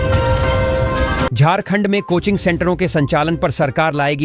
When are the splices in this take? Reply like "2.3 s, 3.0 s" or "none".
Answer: 1.3 s